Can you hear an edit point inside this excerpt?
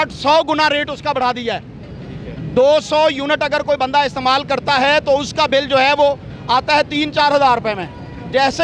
no; 0 cuts

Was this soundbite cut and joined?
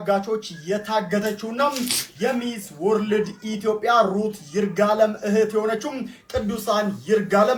no; 0 cuts

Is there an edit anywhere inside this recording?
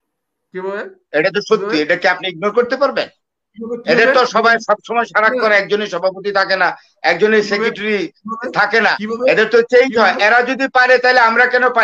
no; 0 cuts

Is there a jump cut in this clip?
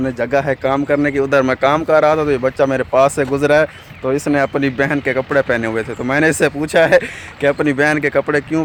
no; 0 cuts

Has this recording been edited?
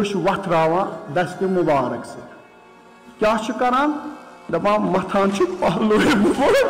no; 0 cuts

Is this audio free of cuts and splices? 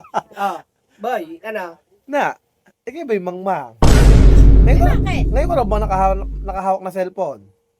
yes; 0 cuts

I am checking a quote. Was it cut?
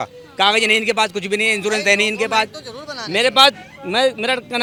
no; 0 cuts

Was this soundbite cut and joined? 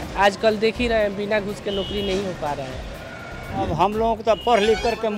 yes; 1 cut; at 3.7 s

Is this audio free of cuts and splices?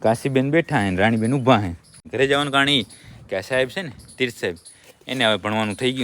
no; 1 cut; at 2.0 s

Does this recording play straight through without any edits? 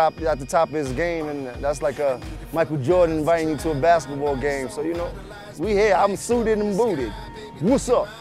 yes; 0 cuts

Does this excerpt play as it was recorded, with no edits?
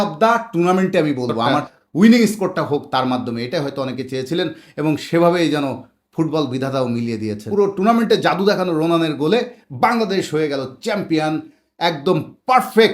no; 2 cuts; at 1.7 s, 7.4 s

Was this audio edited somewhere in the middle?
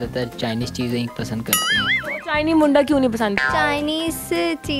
no; 0 cuts

